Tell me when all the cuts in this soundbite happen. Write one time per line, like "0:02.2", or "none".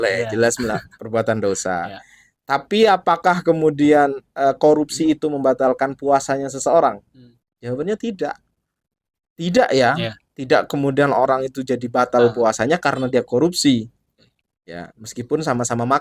none